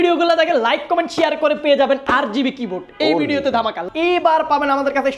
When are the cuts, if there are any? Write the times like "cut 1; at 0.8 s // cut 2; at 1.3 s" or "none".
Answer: cut 1; at 3.8 s